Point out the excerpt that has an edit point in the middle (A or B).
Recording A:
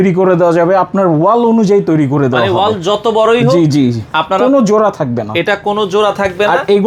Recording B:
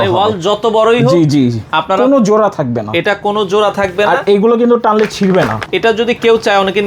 B